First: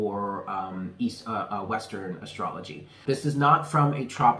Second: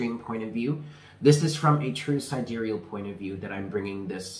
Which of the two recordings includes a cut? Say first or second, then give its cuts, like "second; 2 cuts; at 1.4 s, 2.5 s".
first; 1 cut; at 3.0 s